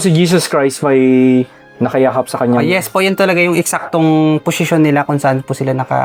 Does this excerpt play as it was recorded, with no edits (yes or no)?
yes